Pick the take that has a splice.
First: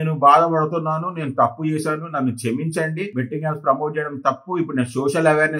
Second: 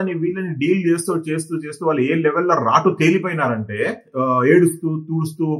second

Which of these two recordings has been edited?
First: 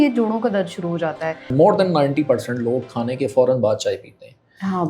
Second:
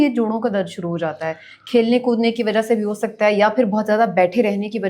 first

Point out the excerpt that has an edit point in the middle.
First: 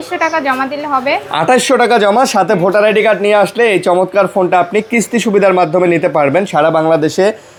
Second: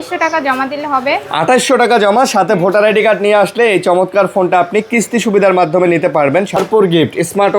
second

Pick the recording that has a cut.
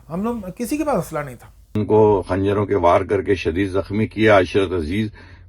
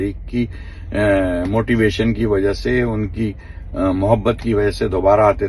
first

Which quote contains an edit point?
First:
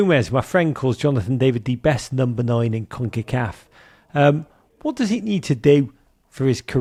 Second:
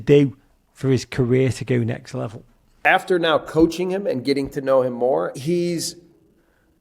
second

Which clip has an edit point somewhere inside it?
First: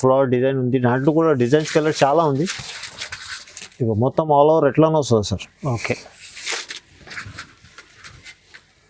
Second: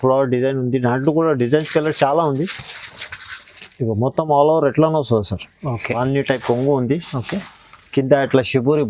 second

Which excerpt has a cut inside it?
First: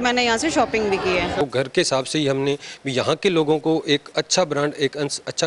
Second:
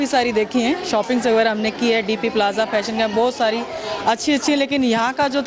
first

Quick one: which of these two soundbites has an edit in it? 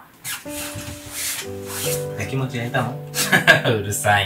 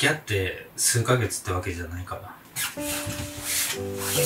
first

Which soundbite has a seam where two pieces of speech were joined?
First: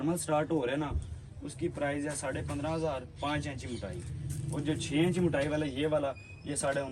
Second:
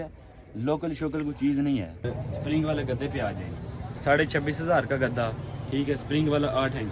second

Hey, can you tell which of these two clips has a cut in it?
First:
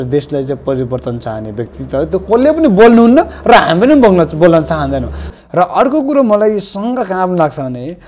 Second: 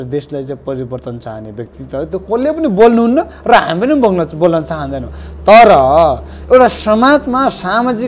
first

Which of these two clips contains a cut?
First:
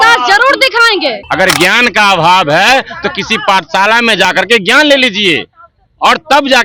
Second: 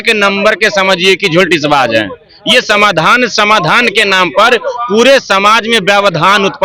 first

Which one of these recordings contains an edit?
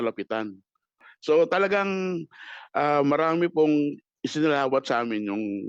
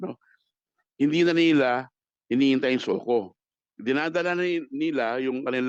first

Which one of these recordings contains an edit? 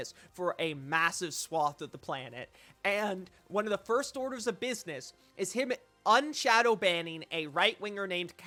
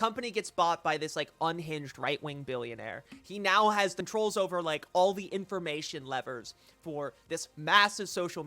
second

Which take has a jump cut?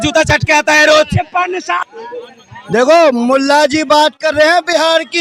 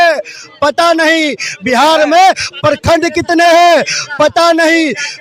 first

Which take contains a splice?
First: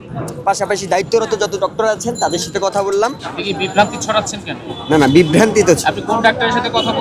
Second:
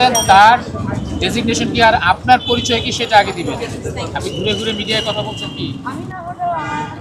first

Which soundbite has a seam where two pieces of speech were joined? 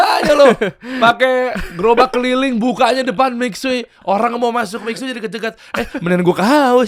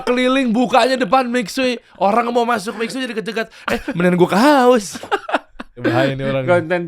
second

